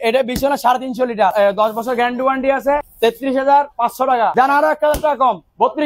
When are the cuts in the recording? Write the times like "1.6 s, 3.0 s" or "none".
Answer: 1.3 s, 2.9 s, 4.3 s